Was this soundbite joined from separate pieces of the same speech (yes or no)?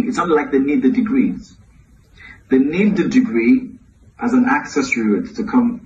no